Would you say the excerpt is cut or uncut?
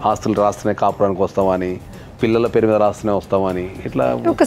uncut